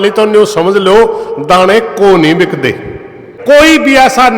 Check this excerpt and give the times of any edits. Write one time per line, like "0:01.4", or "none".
0:03.3